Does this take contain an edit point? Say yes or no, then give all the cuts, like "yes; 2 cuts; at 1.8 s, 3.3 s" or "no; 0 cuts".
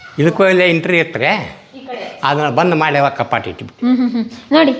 no; 0 cuts